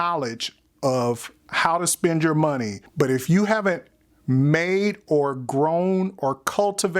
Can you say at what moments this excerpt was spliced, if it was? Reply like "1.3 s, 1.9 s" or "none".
2.8 s